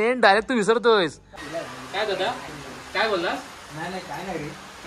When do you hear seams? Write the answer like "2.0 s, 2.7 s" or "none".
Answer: 1.3 s